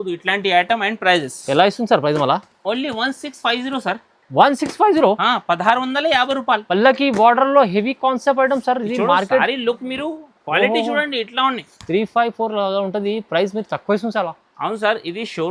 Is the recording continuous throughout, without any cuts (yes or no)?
yes